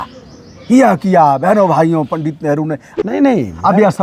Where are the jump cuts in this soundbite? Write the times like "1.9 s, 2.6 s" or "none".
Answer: 2.9 s